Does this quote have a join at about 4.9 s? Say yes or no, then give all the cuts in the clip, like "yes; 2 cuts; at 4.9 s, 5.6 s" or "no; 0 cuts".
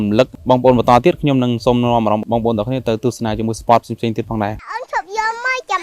no; 0 cuts